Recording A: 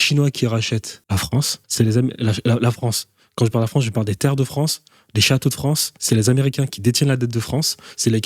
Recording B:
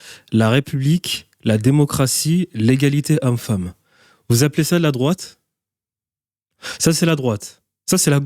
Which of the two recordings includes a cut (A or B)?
A